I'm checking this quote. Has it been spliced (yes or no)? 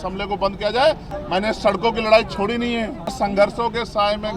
yes